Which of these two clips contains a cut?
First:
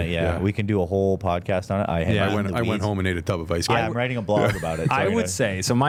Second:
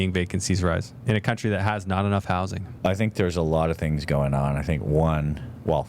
second; 2 cuts; at 0.9 s, 2.6 s

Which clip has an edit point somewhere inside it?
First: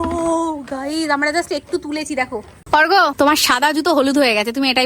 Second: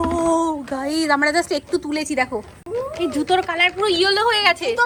first; 1 cut; at 2.6 s

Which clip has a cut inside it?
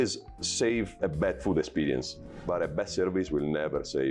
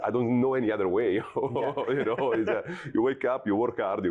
first; 2 cuts; at 0.9 s, 2.4 s

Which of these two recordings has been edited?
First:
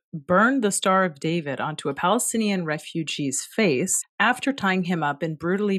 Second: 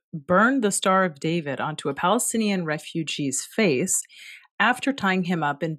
first; 1 cut; at 4.0 s

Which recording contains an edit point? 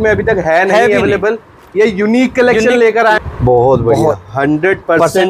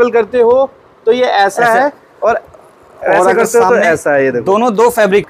first; 1 cut; at 3.2 s

